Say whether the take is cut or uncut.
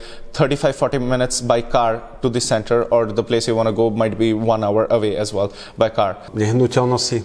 cut